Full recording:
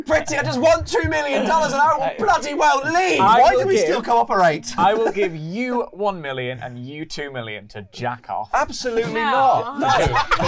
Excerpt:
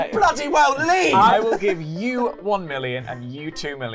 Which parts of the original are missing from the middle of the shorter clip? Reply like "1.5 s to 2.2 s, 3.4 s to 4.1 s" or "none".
3.4 s to 4.9 s